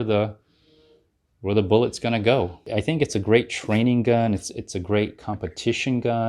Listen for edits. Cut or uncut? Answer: cut